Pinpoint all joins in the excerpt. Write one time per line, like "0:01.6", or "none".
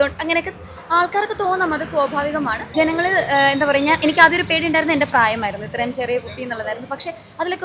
0:02.6

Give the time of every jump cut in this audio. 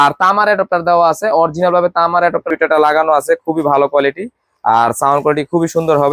0:02.5

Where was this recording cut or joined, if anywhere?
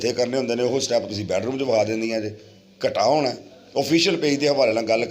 none

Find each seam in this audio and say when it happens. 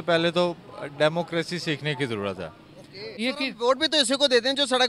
0:03.2

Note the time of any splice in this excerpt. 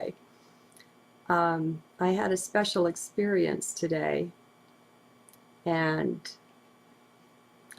0:02.4

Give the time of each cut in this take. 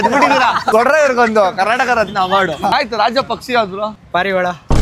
0:02.7
0:04.0

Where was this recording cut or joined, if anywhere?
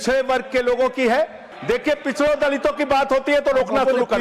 0:01.5

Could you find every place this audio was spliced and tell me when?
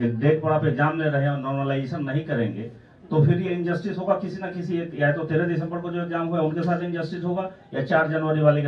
none

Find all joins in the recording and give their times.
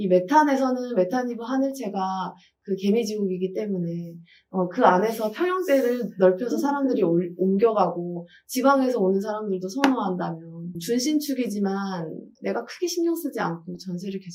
none

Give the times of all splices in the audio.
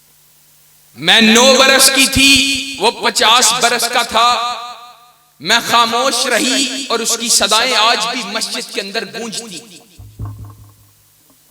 none

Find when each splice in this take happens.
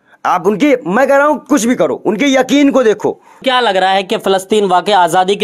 0:03.4

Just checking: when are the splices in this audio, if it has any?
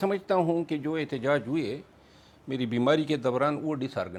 none

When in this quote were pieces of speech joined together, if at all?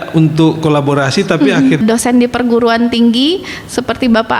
0:01.8

